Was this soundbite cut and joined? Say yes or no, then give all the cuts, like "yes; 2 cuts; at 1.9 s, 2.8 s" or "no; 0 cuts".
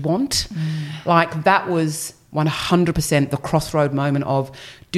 yes; 1 cut; at 0.9 s